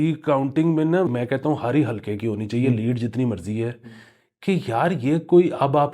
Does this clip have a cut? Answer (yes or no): yes